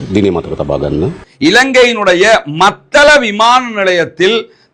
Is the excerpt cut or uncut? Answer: cut